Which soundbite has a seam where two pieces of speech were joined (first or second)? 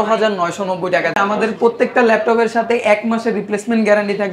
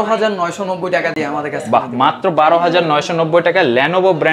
first